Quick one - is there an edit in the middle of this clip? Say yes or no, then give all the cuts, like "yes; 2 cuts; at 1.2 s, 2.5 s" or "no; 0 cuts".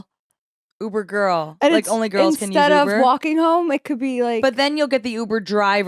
no; 0 cuts